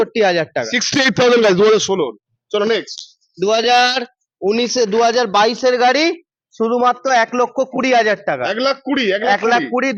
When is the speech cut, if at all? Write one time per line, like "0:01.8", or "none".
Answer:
none